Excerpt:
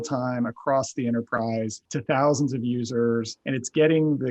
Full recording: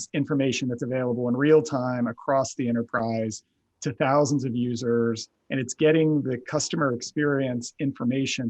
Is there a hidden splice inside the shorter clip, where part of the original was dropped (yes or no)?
yes